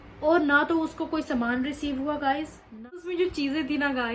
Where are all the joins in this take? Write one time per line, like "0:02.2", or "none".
0:02.8